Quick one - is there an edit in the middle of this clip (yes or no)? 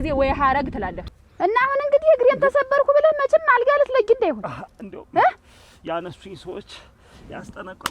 yes